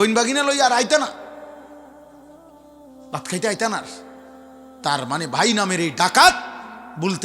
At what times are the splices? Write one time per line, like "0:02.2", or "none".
0:01.5
0:02.9